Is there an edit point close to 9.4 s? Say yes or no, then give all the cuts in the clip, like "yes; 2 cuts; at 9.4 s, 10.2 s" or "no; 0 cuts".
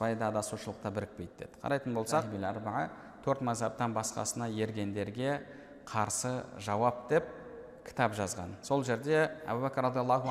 yes; 2 cuts; at 2.3 s, 9.4 s